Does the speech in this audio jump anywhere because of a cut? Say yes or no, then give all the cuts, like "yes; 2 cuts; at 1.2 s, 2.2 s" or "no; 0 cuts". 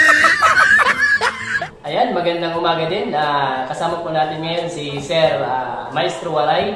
yes; 1 cut; at 1.5 s